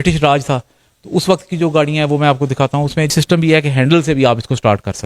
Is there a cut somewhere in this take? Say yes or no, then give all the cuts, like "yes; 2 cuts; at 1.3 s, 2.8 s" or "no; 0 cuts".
yes; 1 cut; at 3.1 s